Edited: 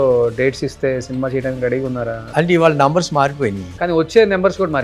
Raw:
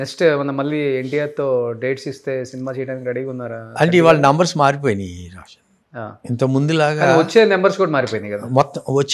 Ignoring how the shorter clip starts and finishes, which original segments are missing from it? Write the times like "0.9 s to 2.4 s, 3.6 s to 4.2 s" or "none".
5.4 s to 7.1 s